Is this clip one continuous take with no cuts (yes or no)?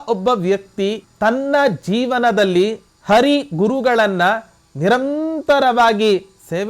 no